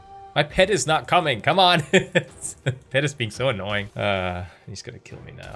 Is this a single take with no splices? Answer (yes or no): no